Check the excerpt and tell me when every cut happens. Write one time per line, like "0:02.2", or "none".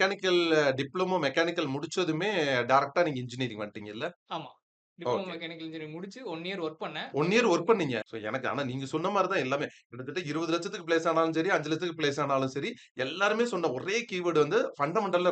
0:08.1